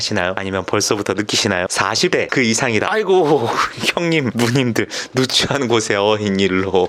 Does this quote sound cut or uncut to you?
uncut